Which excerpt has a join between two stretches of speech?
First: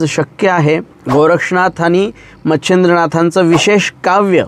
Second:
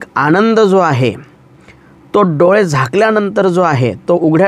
first; 1 cut; at 0.9 s

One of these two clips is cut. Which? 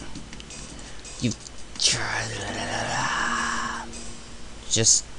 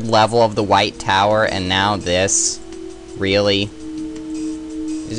first; 1 cut; at 3.0 s

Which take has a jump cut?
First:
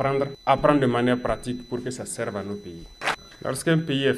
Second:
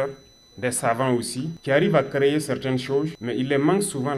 first; 1 cut; at 3.0 s

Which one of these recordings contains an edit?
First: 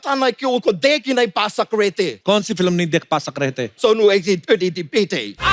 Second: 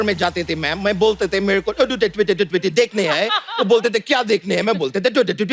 first; 2 cuts; at 2.2 s, 3.7 s

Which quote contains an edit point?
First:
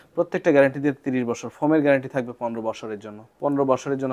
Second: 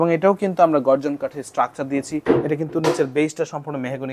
second; 1 cut; at 2.2 s

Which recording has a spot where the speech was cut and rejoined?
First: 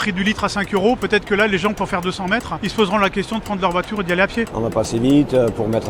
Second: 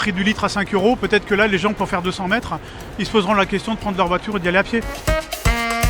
first; 2 cuts; at 2.6 s, 4.5 s

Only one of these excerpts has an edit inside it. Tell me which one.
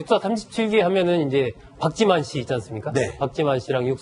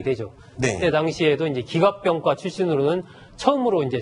second; 1 cut; at 3.1 s

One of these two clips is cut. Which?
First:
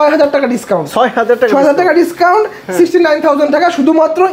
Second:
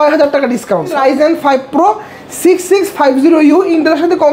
second; 1 cut; at 0.9 s

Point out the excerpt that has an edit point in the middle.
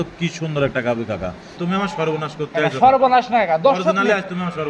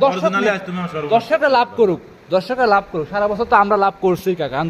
first; 1 cut; at 1.5 s

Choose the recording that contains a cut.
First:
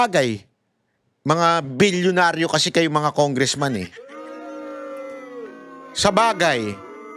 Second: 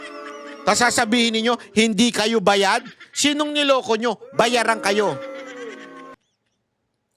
second; 1 cut; at 6.2 s

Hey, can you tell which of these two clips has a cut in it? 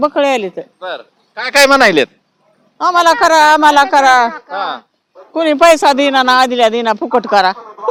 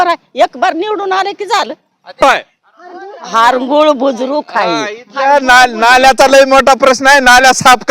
second; 1 cut; at 2.2 s

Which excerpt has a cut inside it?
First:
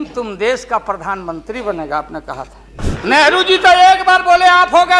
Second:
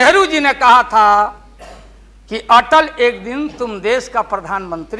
first; 1 cut; at 2.8 s

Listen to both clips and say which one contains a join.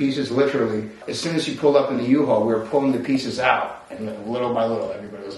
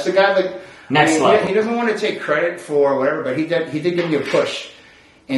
first; 1 cut; at 1.1 s

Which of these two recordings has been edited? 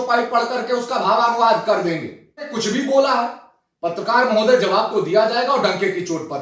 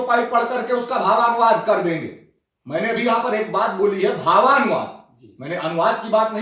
first; 1 cut; at 2.5 s

